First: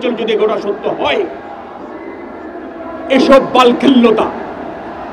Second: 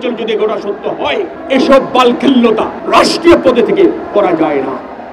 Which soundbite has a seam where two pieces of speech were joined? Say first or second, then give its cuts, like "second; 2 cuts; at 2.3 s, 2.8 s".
second; 2 cuts; at 1.4 s, 2.8 s